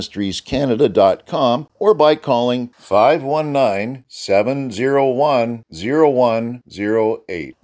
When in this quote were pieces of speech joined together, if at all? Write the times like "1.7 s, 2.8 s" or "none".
1.7 s